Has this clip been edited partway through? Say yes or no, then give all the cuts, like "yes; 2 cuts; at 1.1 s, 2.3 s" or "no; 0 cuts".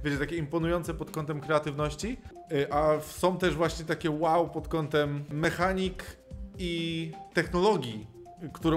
yes; 3 cuts; at 2.3 s, 5.4 s, 7.2 s